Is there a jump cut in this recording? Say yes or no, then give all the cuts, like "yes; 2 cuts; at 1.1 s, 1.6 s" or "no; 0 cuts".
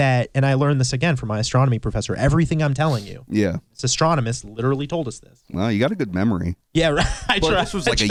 no; 0 cuts